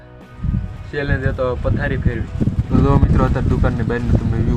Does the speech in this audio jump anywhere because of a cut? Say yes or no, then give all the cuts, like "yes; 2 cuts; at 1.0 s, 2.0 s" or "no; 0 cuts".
no; 0 cuts